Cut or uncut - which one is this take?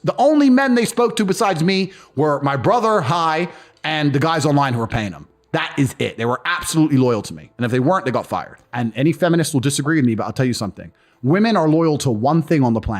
cut